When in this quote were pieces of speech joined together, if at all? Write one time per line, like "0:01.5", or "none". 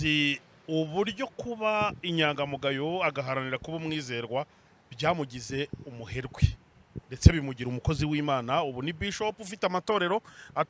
none